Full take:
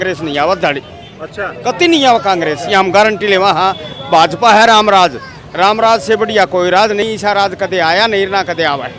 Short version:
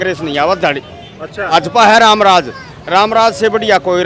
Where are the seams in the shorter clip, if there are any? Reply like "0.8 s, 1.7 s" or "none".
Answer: 1.5 s